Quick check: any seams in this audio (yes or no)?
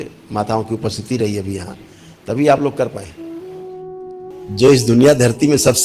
yes